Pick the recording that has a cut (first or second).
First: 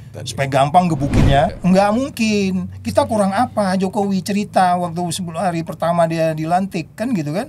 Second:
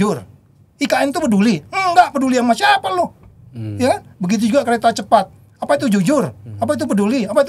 first